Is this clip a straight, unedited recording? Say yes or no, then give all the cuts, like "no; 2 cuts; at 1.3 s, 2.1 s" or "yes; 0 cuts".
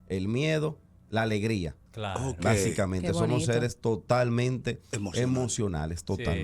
no; 1 cut; at 1.8 s